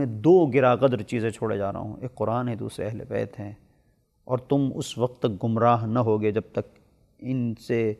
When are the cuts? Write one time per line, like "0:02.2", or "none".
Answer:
none